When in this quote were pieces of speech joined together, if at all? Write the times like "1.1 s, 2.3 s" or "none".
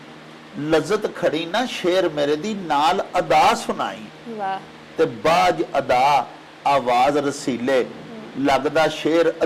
none

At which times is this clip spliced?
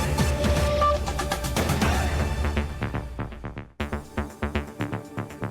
3.7 s

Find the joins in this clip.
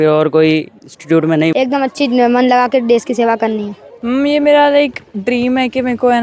1.5 s, 3.9 s

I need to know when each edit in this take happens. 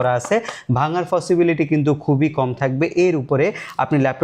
none

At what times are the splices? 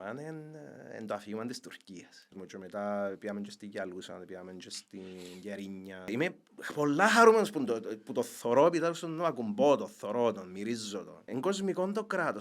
2.3 s, 6.1 s, 11.2 s

